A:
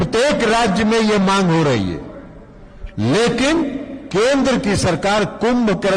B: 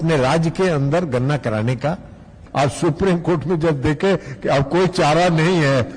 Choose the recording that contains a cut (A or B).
B